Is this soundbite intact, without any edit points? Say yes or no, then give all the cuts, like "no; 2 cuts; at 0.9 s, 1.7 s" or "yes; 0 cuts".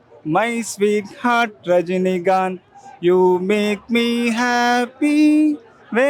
yes; 0 cuts